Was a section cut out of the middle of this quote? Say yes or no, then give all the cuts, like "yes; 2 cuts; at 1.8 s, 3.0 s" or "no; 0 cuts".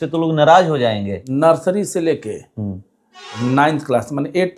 yes; 1 cut; at 1.2 s